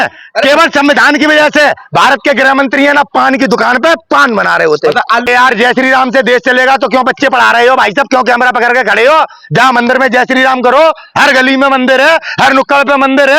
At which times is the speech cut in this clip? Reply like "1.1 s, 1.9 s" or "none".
5.2 s